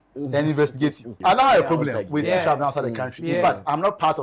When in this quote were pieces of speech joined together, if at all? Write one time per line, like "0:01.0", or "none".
0:01.1